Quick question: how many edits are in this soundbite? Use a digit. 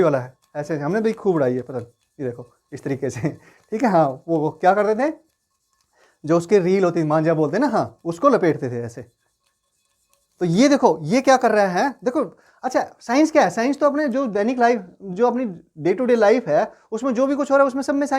0